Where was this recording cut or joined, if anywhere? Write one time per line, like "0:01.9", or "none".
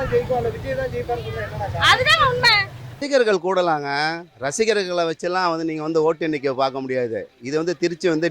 0:03.0